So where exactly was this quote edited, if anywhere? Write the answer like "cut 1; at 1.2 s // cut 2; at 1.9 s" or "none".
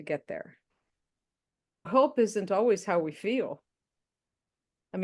cut 1; at 1.9 s